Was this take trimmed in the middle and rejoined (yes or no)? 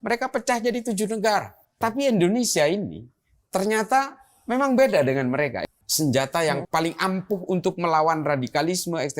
yes